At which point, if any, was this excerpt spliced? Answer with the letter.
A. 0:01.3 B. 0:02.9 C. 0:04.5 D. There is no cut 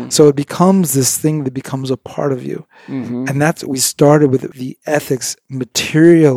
C